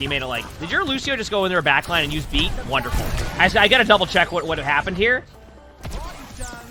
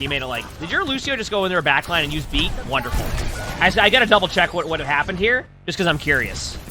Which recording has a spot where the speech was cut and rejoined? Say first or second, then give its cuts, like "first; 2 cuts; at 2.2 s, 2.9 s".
first; 2 cuts; at 3.2 s, 5.3 s